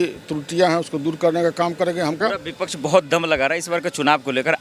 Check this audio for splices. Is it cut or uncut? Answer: cut